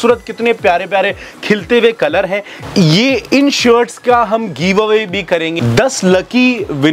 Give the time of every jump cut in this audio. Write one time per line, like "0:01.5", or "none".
0:02.5
0:05.6